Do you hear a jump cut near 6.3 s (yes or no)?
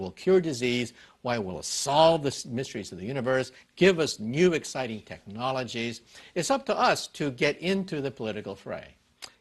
yes